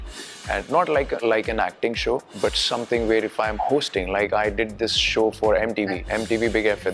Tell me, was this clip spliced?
yes; 3 cuts; at 1.2 s, 2.3 s, 6.0 s

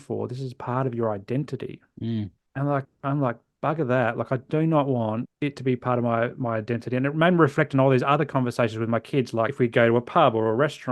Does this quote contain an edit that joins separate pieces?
yes; 3 cuts; at 2.4 s, 5.3 s, 9.5 s

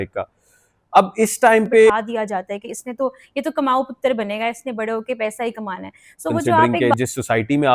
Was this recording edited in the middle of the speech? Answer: yes; 2 cuts; at 1.9 s, 6.7 s

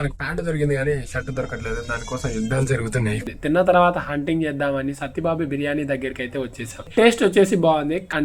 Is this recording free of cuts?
no; 2 cuts; at 3.2 s, 6.7 s

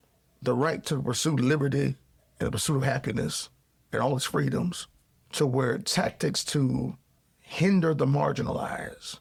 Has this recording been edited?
no; 0 cuts

